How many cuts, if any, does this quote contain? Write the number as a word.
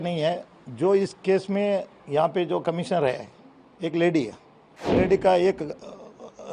one